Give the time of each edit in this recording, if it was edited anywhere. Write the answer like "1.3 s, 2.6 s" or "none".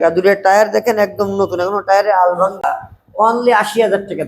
2.7 s